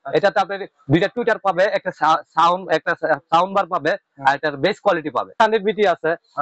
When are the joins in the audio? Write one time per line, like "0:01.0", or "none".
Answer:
0:05.3